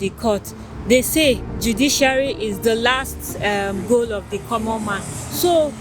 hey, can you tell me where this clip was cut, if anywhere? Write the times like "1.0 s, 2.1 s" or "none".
2.6 s